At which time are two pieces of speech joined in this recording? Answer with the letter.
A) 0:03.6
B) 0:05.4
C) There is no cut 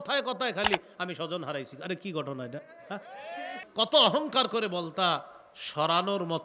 A